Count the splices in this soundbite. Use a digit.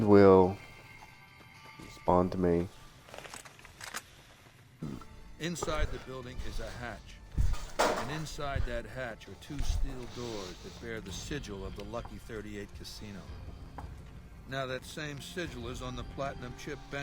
1